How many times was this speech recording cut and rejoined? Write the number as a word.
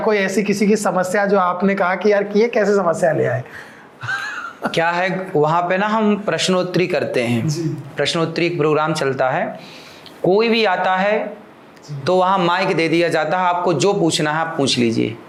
zero